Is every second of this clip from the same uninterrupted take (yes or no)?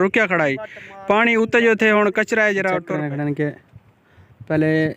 no